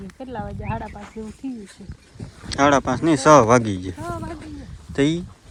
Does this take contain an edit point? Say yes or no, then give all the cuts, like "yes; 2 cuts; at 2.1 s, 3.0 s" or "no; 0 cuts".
no; 0 cuts